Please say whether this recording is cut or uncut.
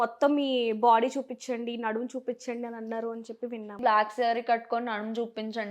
cut